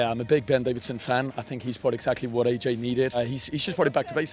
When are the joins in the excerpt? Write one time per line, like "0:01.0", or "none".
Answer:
0:03.2